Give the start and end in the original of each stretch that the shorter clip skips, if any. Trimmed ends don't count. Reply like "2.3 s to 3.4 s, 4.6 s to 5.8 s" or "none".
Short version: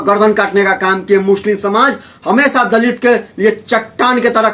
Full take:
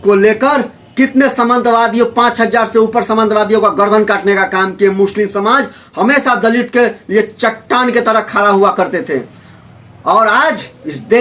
none